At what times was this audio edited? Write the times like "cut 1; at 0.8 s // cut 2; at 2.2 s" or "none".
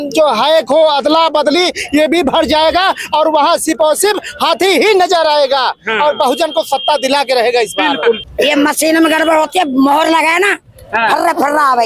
cut 1; at 8.2 s